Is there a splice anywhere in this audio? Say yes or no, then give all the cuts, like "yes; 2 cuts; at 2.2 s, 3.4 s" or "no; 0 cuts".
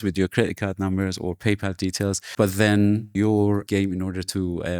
yes; 2 cuts; at 2.2 s, 3.5 s